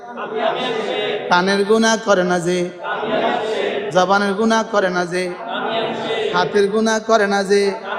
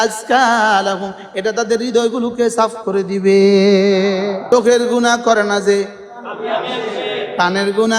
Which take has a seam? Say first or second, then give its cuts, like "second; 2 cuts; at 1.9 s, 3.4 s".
second; 1 cut; at 4.4 s